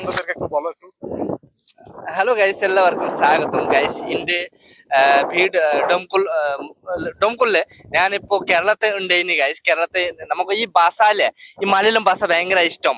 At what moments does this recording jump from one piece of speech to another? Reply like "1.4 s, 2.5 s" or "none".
none